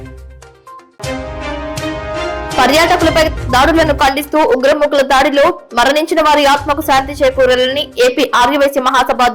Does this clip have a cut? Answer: yes; 2 cuts; at 0.9 s, 2.6 s

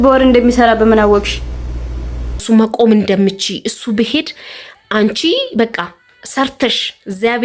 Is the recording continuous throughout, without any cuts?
no; 1 cut; at 2.4 s

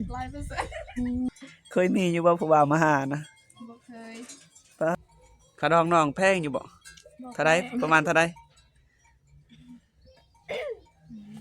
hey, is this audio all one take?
no; 2 cuts; at 1.3 s, 4.9 s

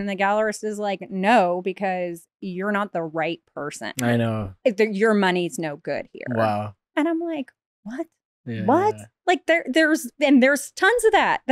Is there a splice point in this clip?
yes; 1 cut; at 6.8 s

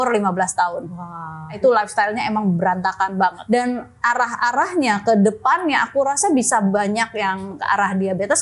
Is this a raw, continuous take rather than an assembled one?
no; 3 cuts; at 1.6 s, 3.4 s, 7.5 s

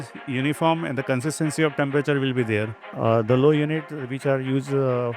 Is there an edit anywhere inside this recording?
yes; 1 cut; at 2.8 s

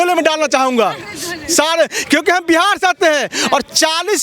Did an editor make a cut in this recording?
no; 0 cuts

